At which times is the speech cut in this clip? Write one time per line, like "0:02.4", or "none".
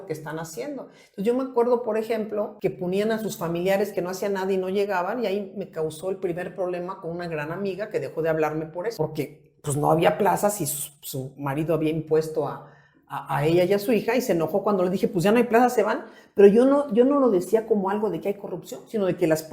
0:02.5
0:08.9